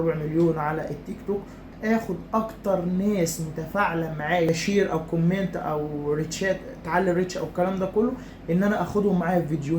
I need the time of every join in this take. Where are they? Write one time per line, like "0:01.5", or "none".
0:01.7
0:04.5